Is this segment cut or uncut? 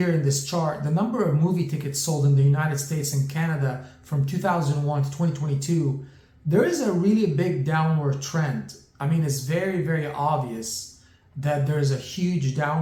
uncut